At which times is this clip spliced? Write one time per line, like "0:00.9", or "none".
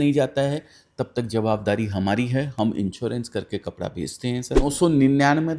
0:04.6